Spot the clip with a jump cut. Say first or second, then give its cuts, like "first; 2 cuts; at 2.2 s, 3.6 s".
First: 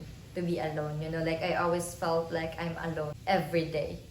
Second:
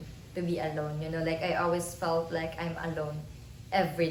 first; 1 cut; at 3.2 s